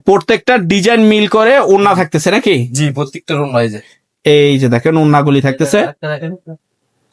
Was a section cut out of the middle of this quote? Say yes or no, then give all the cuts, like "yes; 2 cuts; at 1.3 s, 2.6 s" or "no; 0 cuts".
no; 0 cuts